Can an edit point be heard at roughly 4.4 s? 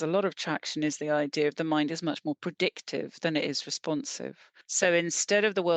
yes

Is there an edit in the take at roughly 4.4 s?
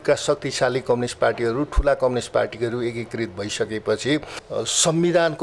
yes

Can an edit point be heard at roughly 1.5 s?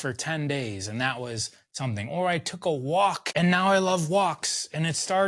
no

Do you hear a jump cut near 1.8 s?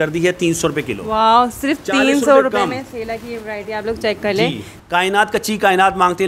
no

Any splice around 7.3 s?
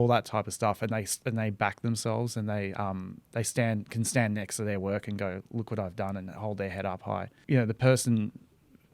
yes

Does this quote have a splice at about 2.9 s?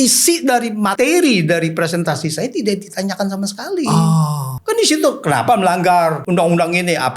no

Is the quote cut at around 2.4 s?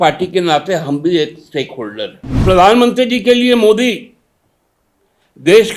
yes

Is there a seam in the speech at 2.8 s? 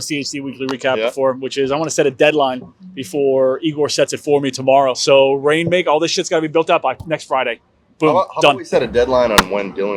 no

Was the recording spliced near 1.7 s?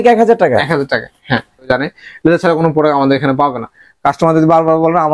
yes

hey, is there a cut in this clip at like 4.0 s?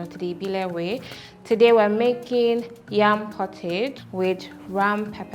yes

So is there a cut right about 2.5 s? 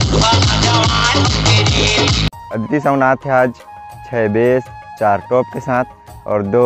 yes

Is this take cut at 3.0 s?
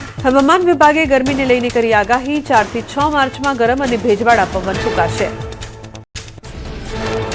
no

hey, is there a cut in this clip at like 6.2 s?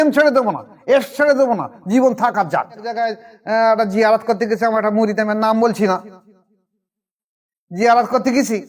no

